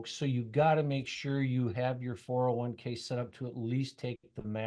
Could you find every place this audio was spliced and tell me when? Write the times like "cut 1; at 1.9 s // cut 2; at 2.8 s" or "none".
none